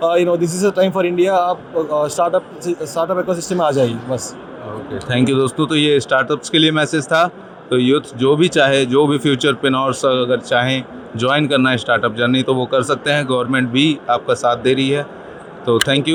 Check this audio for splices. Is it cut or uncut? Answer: uncut